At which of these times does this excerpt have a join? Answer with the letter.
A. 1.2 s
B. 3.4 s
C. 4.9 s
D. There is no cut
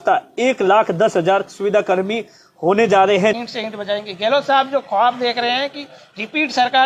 B